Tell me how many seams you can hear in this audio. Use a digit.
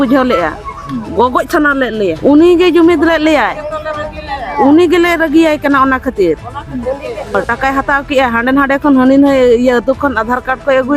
2